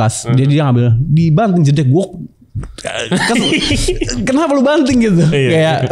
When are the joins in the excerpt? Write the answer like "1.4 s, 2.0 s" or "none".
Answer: none